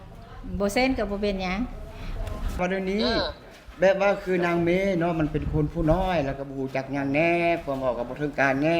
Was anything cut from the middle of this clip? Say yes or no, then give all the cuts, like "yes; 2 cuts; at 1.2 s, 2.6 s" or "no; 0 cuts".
yes; 1 cut; at 2.6 s